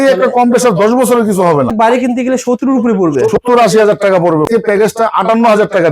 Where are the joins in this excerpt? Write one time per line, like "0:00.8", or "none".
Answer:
0:01.7
0:04.5